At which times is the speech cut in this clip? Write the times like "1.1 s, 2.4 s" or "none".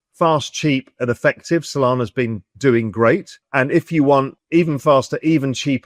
2.4 s, 3.4 s, 4.4 s